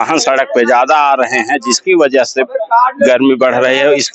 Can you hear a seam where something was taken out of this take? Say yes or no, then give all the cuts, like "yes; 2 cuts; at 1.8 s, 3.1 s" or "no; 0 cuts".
no; 0 cuts